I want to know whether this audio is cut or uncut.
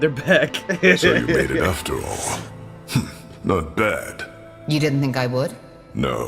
cut